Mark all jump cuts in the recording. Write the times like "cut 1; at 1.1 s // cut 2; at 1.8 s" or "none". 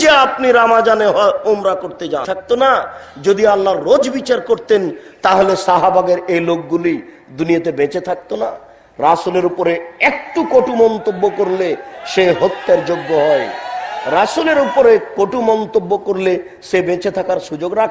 cut 1; at 2.3 s